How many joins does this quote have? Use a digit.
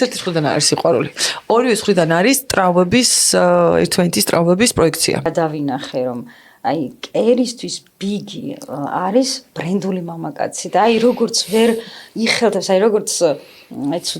1